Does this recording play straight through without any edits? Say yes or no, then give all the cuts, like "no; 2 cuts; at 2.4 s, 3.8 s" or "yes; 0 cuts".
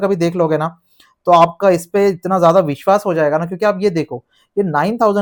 yes; 0 cuts